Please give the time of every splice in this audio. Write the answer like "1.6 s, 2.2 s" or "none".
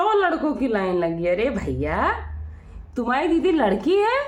none